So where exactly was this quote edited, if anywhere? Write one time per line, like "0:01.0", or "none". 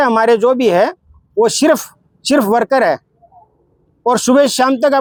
none